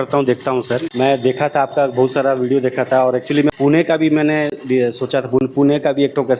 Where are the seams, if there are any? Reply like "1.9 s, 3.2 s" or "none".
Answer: 0.9 s, 3.5 s